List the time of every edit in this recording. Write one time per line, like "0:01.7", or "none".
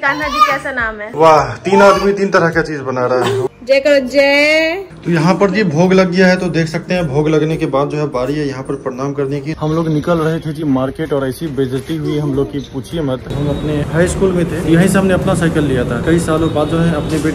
0:01.0
0:03.4
0:04.8
0:09.6
0:13.3
0:14.6
0:16.0